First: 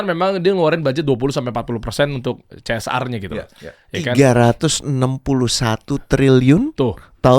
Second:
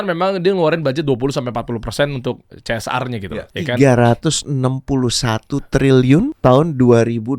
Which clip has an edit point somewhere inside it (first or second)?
second